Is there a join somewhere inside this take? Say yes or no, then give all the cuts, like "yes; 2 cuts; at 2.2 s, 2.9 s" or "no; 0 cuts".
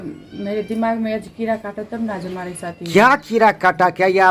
no; 0 cuts